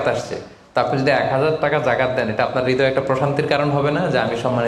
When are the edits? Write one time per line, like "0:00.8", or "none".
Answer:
none